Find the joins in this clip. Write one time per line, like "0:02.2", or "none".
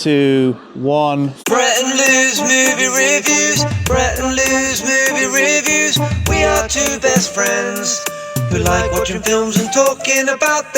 0:01.4